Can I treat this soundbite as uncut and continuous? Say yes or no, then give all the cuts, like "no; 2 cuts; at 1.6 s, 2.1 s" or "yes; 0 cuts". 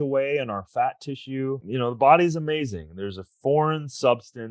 no; 1 cut; at 1.7 s